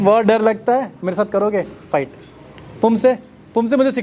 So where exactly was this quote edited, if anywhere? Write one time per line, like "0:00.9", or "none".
none